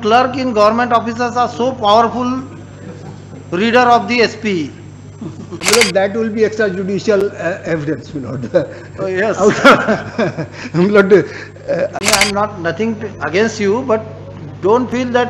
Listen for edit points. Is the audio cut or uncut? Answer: cut